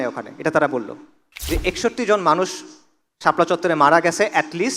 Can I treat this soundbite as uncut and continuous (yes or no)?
no